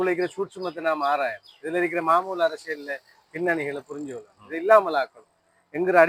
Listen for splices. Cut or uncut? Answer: uncut